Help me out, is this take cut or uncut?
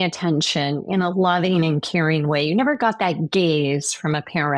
uncut